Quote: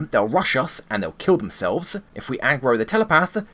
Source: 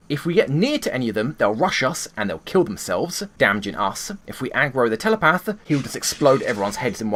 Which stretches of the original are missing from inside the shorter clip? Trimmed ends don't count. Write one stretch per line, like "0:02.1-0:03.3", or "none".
0:03.2-0:04.1